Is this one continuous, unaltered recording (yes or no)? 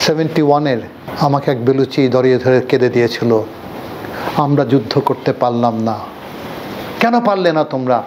no